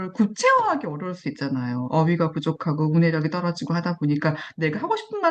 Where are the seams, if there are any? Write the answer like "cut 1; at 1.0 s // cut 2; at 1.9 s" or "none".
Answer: none